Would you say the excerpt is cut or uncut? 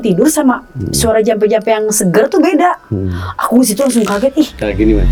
uncut